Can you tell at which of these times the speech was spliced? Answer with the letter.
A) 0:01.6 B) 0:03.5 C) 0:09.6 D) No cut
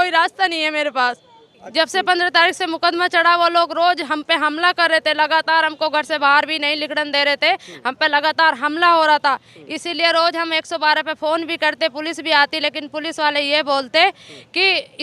A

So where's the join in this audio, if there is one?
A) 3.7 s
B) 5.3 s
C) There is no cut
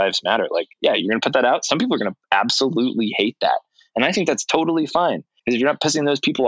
B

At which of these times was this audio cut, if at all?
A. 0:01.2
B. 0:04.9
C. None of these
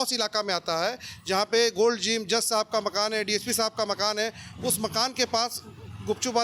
C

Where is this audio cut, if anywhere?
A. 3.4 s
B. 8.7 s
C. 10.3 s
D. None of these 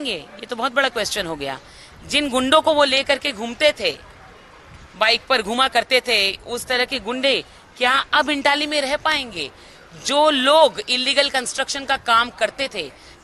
D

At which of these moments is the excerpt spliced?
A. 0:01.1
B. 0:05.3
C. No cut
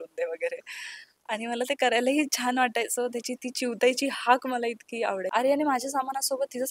B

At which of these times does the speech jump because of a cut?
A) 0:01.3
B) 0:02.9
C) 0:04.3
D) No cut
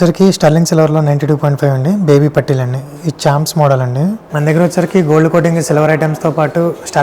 C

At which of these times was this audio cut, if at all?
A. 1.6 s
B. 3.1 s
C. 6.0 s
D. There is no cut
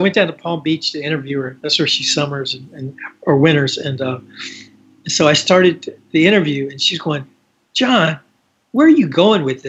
D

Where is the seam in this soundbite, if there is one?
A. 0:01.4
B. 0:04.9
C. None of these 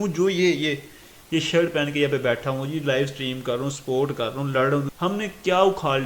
B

